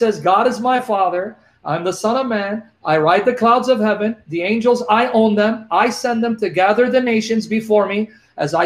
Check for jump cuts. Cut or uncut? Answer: uncut